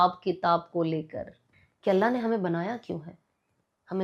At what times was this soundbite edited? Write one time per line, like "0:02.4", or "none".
0:01.4